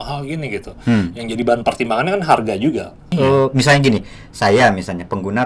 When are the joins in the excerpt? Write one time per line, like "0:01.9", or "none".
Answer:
0:03.1